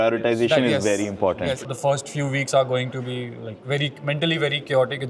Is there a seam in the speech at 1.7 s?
yes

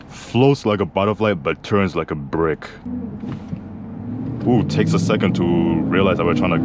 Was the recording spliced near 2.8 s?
yes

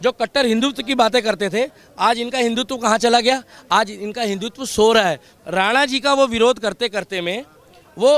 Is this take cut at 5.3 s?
yes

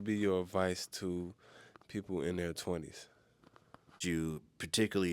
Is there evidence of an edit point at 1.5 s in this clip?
no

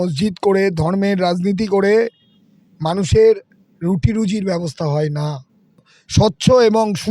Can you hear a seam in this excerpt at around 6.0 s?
yes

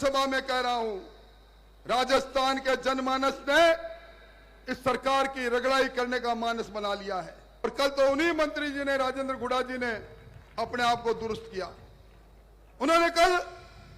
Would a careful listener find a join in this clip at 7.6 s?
yes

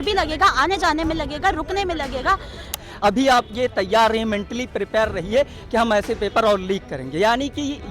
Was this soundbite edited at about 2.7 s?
yes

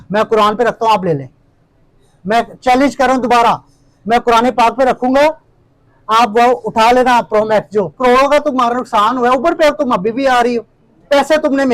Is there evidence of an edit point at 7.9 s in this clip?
yes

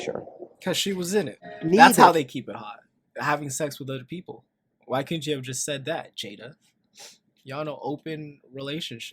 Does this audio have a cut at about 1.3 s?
yes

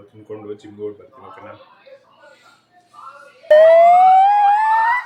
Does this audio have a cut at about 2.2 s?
no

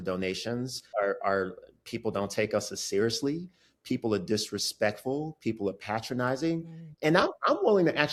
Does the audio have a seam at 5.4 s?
no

